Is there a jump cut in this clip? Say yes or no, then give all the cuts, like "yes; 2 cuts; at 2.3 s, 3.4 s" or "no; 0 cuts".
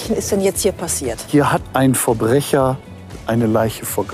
yes; 1 cut; at 1.3 s